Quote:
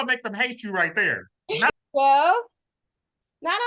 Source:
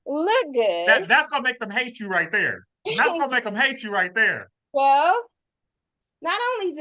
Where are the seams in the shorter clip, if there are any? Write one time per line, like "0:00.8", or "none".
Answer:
0:01.7